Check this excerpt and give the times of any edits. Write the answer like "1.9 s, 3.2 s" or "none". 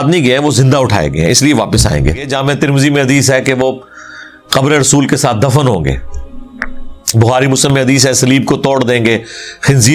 2.3 s